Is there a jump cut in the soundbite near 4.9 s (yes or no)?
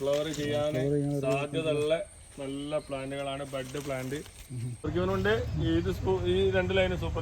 yes